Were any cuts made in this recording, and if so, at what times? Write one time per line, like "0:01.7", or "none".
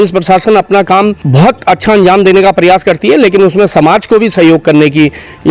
0:01.2